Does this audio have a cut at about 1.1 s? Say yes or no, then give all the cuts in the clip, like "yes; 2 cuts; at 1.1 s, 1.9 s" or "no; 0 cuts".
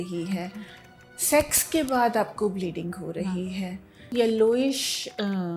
no; 1 cut; at 4.1 s